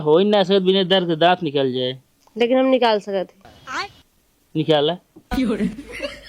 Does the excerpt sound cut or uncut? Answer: cut